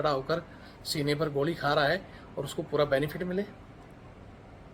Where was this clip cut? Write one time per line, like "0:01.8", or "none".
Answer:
none

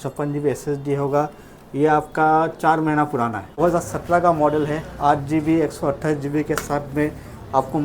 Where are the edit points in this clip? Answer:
0:03.6

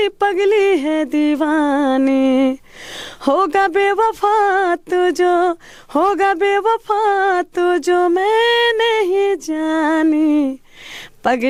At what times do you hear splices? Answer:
none

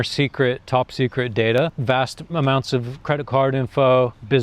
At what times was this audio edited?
0:01.8
0:02.9

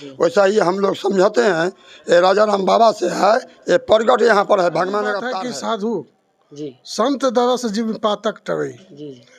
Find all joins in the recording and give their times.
0:05.2

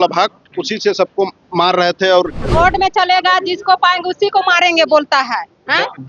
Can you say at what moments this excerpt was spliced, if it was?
0:02.4

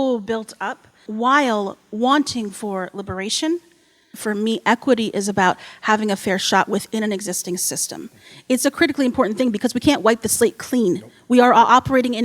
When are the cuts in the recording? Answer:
0:01.0
0:04.2

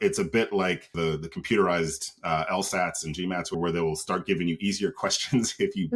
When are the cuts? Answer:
0:00.9
0:03.5

